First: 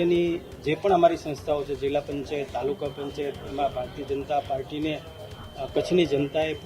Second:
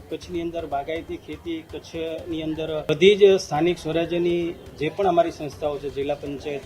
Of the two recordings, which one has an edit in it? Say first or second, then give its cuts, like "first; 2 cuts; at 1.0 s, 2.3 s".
second; 1 cut; at 2.9 s